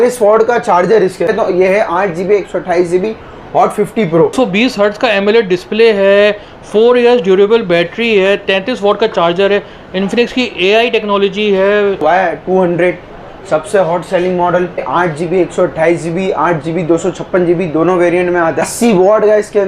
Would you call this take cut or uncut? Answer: cut